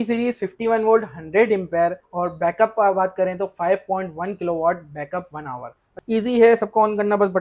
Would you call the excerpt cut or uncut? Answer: cut